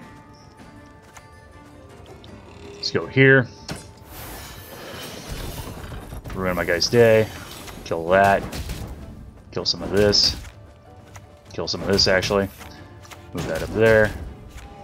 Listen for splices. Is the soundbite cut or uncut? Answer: uncut